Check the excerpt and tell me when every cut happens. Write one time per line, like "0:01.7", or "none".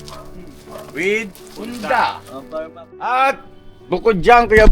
0:02.8